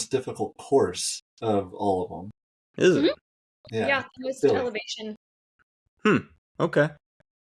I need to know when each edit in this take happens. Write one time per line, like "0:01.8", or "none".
none